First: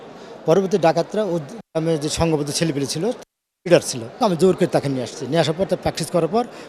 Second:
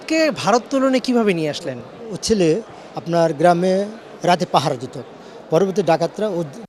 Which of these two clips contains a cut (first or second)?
first